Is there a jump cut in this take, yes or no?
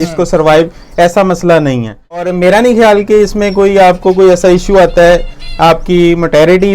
yes